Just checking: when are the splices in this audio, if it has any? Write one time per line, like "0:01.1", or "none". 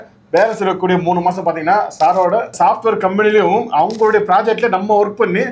none